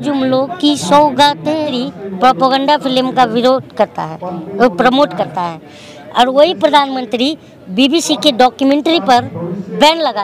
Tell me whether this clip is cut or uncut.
cut